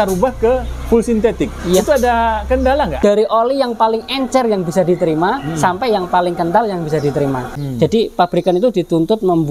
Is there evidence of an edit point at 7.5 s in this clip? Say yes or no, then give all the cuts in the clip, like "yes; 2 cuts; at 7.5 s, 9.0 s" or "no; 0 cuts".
yes; 2 cuts; at 2.9 s, 7.5 s